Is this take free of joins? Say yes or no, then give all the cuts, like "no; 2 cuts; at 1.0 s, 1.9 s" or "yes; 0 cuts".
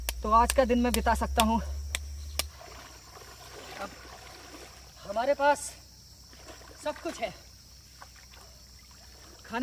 no; 1 cut; at 2.5 s